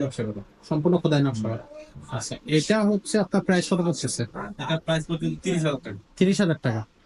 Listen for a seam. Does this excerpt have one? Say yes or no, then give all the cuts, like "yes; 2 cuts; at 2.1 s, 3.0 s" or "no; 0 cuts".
no; 0 cuts